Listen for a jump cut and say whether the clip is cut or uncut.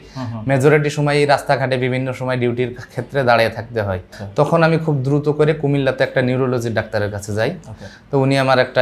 cut